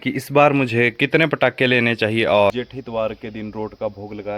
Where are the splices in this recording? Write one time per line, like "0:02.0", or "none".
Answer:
0:02.5

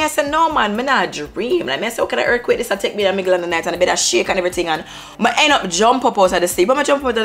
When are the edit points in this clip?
none

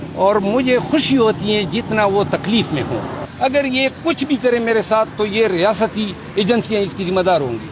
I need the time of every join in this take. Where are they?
0:03.2

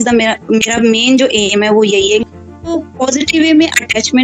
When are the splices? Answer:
0:02.7

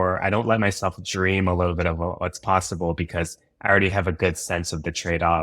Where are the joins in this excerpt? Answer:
none

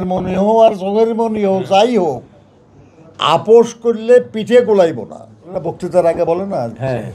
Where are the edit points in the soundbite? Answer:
0:05.5

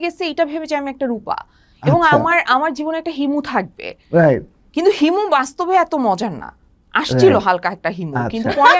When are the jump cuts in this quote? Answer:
none

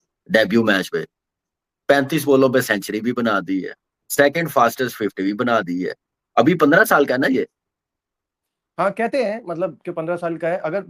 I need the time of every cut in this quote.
none

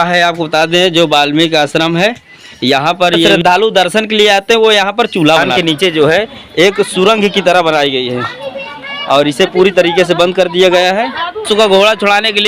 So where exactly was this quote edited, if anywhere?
0:03.3
0:05.5
0:11.4

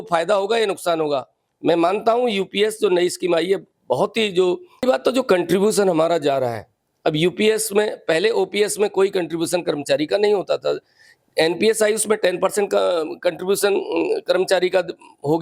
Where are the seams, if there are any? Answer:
0:04.8

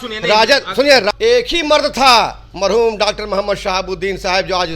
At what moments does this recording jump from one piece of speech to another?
0:01.1

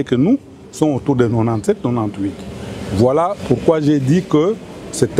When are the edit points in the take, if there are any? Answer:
none

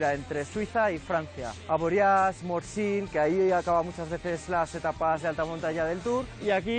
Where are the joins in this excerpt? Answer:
0:01.5

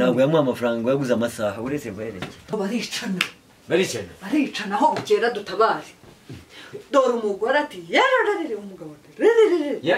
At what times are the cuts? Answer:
0:02.5

